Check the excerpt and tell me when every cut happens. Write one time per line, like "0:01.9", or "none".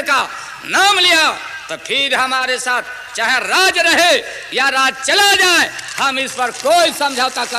none